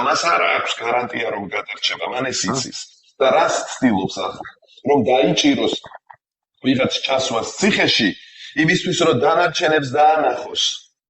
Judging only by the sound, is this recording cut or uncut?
uncut